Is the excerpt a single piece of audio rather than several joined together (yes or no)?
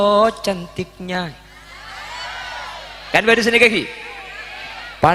yes